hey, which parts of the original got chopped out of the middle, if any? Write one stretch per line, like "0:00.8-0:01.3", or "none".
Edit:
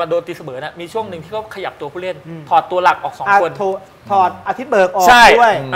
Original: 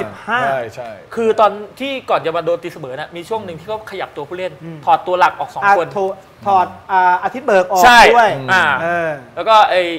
0:06.8-0:07.2